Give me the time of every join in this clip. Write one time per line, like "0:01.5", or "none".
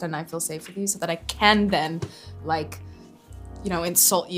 none